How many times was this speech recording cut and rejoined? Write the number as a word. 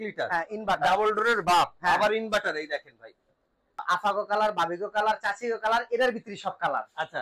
one